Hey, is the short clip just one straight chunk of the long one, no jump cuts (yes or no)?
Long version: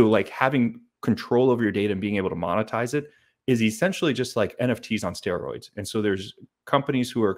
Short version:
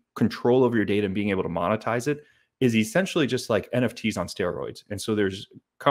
yes